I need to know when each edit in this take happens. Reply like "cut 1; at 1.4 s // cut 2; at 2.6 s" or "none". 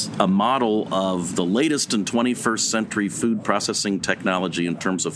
none